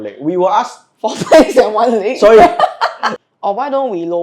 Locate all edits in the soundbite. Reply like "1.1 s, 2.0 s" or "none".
3.1 s